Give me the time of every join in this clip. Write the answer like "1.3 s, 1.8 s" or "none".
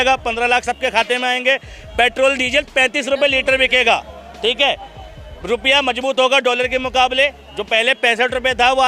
none